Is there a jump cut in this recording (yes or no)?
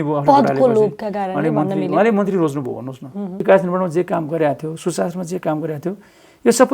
yes